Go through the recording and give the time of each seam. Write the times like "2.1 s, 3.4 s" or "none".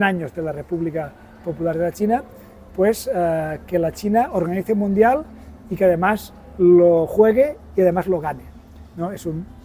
none